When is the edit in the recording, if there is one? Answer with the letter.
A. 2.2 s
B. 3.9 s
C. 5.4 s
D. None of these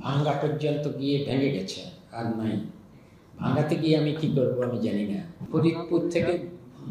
C